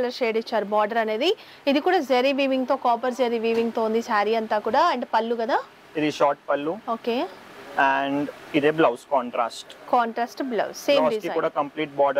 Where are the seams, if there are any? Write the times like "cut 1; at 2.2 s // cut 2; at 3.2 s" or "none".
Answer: none